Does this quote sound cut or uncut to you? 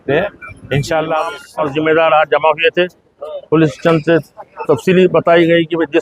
cut